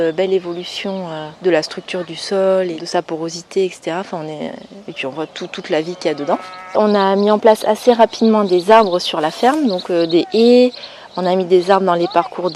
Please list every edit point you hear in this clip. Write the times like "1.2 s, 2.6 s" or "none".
1.2 s, 2.8 s, 6.8 s